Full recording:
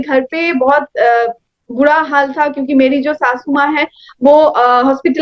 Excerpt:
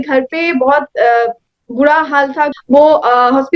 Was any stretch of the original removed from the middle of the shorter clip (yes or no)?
yes